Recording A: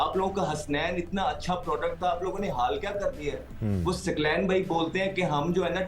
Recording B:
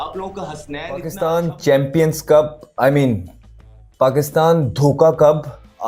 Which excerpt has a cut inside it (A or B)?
B